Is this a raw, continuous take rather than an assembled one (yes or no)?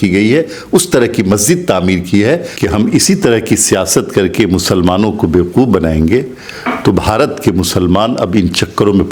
no